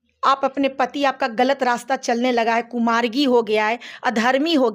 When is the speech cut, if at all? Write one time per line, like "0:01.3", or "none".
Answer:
none